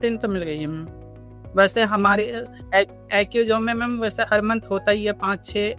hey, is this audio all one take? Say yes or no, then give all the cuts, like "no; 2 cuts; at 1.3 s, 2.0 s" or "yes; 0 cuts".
yes; 0 cuts